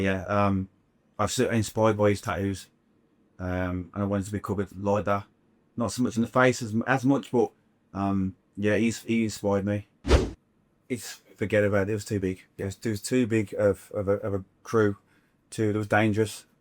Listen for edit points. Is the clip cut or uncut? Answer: cut